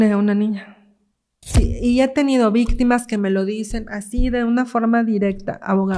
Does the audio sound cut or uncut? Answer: cut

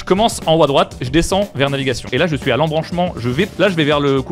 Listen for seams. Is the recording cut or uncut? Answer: cut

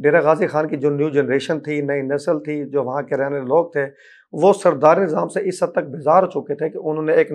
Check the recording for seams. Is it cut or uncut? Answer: uncut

